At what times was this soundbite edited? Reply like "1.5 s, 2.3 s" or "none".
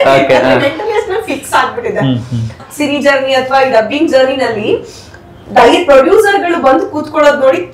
2.6 s